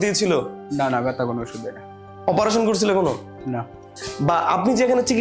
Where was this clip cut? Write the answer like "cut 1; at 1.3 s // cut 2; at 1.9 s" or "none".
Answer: cut 1; at 4.0 s

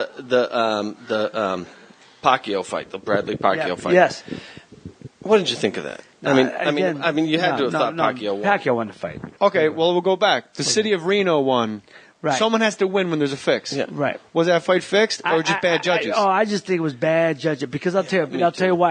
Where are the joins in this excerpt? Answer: cut 1; at 4.4 s

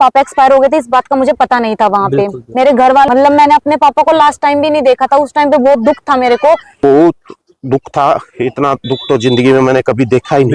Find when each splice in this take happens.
cut 1; at 3.1 s // cut 2; at 6.8 s

